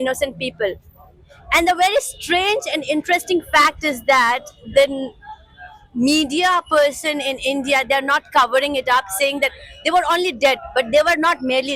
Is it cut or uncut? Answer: uncut